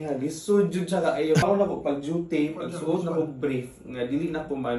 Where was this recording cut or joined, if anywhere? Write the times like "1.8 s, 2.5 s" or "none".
1.4 s